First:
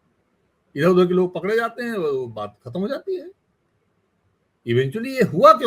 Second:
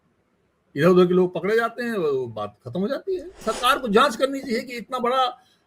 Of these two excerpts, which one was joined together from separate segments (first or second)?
second